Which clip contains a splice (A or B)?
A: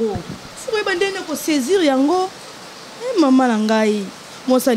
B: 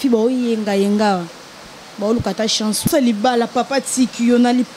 B